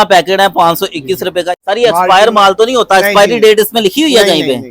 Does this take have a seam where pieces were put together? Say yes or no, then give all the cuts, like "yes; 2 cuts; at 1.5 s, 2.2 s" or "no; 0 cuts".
yes; 1 cut; at 1.5 s